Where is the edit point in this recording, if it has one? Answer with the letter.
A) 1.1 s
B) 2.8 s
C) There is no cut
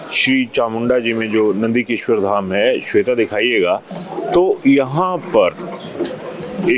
C